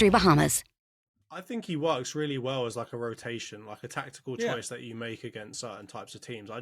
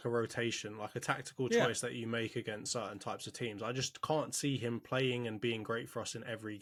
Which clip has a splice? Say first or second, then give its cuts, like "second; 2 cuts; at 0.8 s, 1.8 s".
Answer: first; 1 cut; at 1.3 s